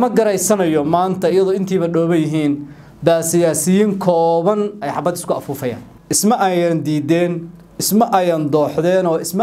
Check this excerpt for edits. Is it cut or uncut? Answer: cut